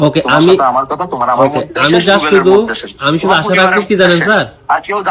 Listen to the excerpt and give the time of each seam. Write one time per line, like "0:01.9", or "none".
none